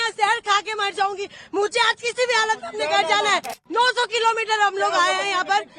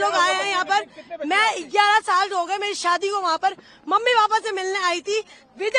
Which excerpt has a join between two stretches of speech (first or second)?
first